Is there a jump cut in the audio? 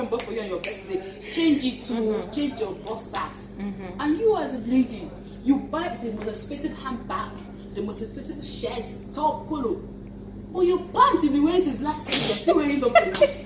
no; 0 cuts

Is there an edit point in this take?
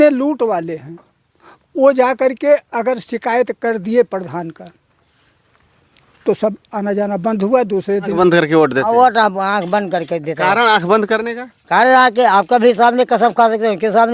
yes; 1 cut; at 8.1 s

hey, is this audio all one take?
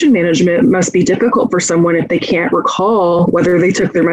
no; 1 cut; at 3.2 s

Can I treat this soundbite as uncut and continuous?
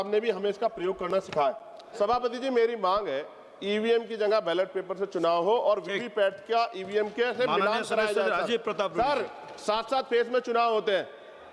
no; 1 cut; at 1.8 s

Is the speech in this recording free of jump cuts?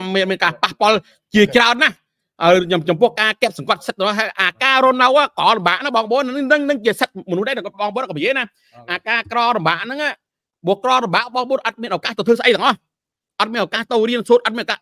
yes; 0 cuts

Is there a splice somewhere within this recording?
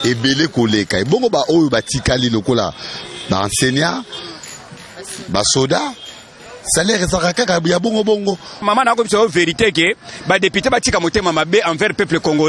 yes; 1 cut; at 8.6 s

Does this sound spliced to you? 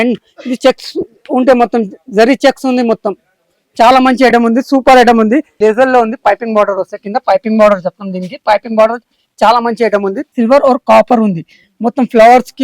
yes; 2 cuts; at 5.5 s, 10.2 s

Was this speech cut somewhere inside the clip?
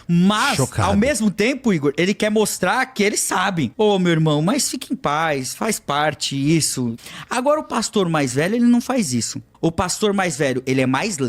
yes; 3 cuts; at 3.7 s, 7.0 s, 9.4 s

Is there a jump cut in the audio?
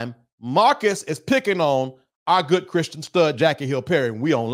no; 0 cuts

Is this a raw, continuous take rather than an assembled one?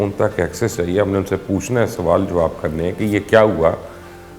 yes; 0 cuts

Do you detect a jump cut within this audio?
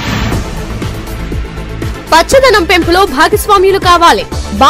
yes; 1 cut; at 1.0 s

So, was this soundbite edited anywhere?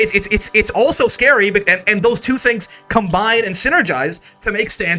no; 0 cuts

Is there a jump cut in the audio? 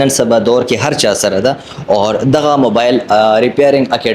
no; 0 cuts

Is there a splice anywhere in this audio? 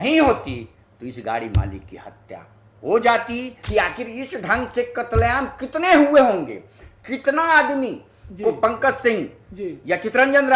yes; 1 cut; at 3.6 s

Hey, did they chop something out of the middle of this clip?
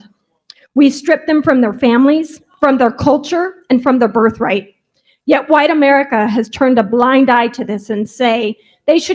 no; 0 cuts

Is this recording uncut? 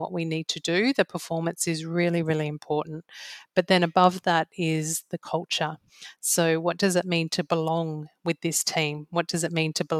yes; 0 cuts

